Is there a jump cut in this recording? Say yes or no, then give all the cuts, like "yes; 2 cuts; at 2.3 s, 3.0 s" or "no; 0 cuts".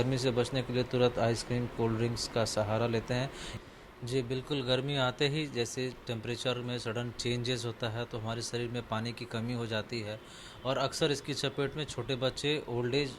yes; 1 cut; at 3.4 s